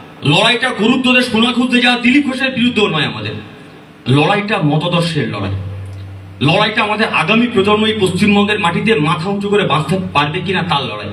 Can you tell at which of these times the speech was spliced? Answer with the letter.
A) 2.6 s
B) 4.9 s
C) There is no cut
C